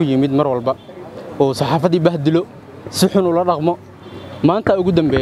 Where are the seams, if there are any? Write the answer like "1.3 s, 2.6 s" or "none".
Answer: none